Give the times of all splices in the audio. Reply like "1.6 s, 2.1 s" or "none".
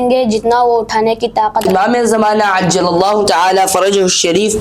1.7 s